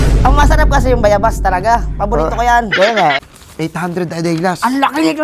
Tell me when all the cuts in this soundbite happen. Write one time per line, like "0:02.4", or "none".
0:03.2